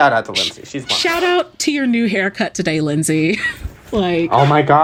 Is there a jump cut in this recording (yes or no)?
no